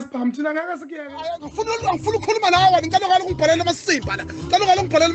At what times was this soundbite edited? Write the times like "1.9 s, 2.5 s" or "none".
1.2 s